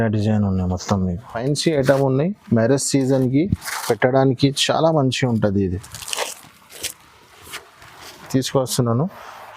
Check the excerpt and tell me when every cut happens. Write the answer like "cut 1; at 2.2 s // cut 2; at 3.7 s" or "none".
cut 1; at 1.3 s // cut 2; at 8.2 s